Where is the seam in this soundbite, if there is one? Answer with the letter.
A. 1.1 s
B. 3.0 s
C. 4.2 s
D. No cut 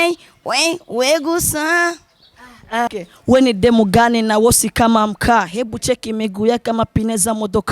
B